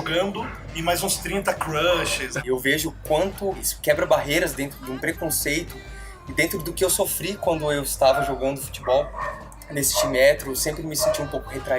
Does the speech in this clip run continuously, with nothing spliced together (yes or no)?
no